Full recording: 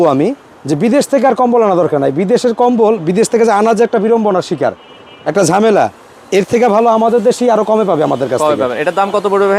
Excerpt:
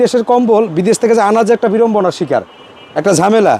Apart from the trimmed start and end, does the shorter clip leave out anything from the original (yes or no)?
no